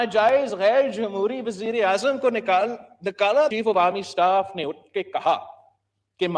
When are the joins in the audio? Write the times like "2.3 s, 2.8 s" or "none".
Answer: 3.5 s